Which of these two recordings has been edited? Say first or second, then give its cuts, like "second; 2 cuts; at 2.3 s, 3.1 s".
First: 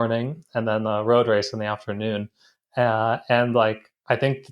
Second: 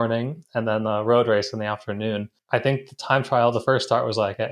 second; 1 cut; at 2.3 s